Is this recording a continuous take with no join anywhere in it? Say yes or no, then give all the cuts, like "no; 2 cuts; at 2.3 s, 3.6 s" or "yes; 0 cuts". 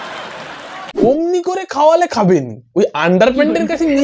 no; 1 cut; at 1.0 s